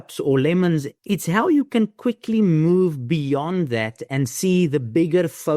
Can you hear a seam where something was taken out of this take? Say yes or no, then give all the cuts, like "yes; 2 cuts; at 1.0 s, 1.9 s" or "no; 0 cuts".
yes; 1 cut; at 0.9 s